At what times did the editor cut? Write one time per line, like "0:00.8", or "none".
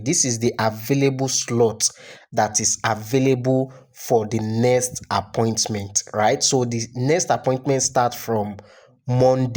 none